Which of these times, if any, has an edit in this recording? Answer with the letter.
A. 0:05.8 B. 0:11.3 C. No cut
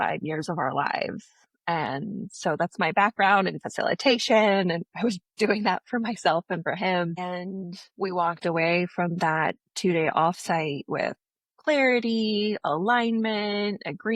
C